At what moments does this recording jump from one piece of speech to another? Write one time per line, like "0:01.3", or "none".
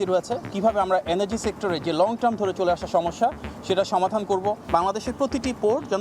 0:04.6